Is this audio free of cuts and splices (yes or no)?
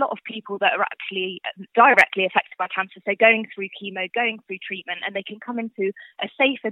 no